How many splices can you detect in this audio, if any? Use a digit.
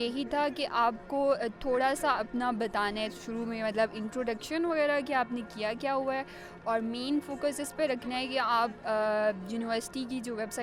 0